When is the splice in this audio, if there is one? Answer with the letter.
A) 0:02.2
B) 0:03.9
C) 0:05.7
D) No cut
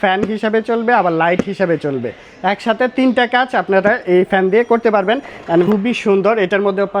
C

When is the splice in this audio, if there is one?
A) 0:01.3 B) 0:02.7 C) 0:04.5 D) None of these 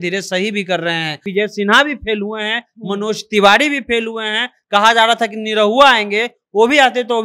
A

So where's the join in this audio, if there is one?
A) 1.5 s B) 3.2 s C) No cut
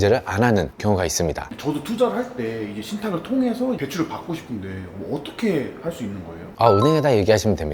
A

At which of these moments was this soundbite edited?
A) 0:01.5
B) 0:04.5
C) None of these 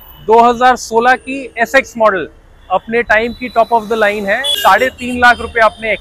B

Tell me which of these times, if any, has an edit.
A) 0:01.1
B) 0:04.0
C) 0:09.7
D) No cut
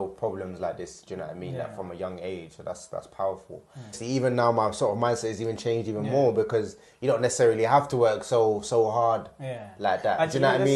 B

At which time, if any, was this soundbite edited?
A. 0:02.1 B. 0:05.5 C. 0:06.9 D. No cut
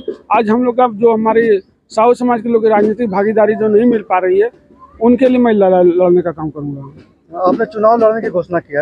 D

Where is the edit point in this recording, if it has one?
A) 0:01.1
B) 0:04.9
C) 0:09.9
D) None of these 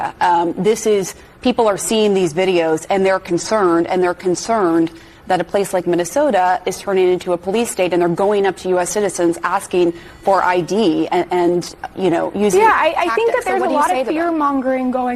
C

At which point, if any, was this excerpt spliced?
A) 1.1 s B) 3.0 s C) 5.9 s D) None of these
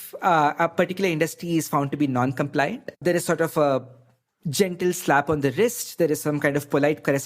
B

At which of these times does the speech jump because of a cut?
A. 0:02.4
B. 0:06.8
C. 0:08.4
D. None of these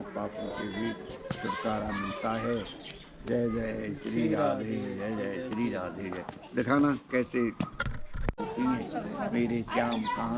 C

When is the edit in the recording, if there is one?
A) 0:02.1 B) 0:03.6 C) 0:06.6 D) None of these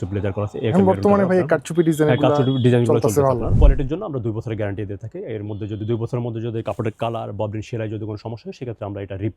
B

